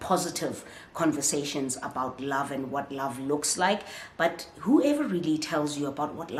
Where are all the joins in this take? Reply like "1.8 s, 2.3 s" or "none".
none